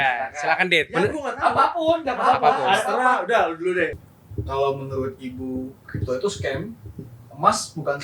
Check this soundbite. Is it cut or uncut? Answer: cut